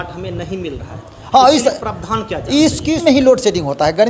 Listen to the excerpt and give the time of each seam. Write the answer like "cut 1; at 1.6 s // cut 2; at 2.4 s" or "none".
cut 1; at 3.0 s